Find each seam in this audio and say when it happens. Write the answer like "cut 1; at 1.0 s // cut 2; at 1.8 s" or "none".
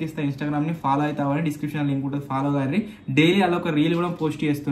none